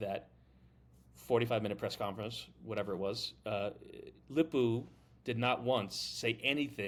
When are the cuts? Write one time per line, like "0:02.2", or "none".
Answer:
none